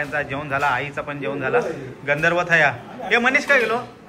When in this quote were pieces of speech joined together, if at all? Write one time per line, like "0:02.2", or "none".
none